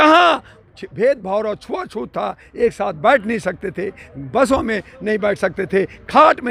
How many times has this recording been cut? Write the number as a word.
zero